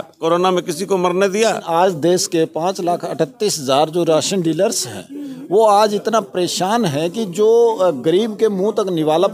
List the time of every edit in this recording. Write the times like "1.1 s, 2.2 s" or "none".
1.6 s